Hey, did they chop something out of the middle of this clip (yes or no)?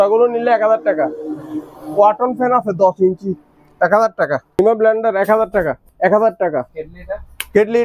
yes